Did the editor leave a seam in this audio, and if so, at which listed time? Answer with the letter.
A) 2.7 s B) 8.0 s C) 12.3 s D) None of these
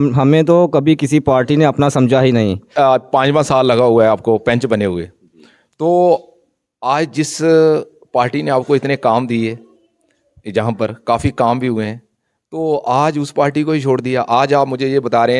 A